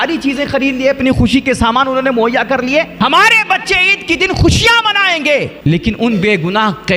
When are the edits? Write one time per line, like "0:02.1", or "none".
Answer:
0:02.9
0:05.5

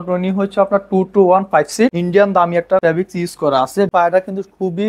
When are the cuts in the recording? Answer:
0:02.0
0:02.8
0:03.9

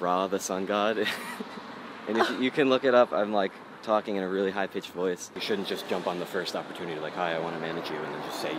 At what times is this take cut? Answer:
0:05.3

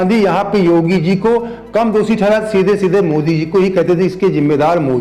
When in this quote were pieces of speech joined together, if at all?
none

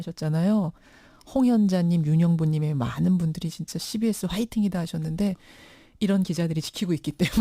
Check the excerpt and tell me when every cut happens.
0:04.5

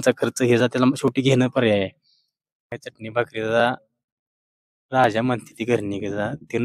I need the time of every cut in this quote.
0:02.7

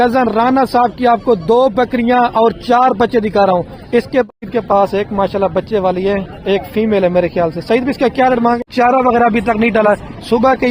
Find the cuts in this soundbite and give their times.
0:04.3
0:08.6

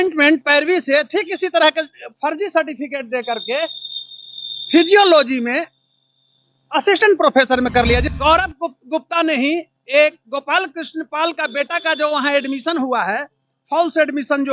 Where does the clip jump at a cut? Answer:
0:08.1

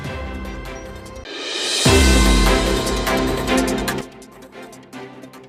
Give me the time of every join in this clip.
0:04.0

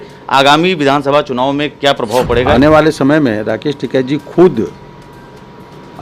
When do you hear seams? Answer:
0:02.5

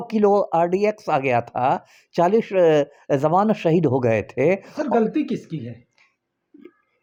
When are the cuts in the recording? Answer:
none

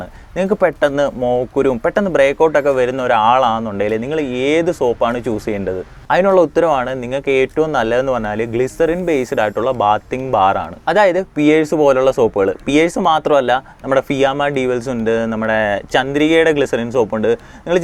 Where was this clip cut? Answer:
none

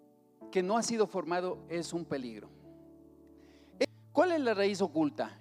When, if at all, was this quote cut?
0:03.8

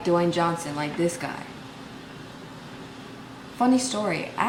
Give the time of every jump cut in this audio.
none

